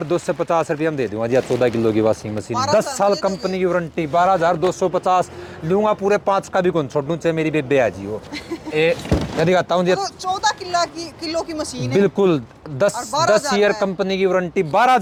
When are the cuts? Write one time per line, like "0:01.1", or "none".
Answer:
none